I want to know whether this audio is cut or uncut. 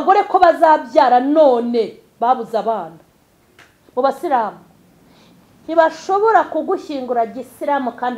cut